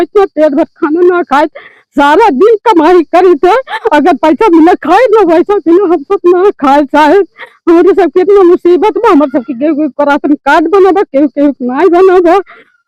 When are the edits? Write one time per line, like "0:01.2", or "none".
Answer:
none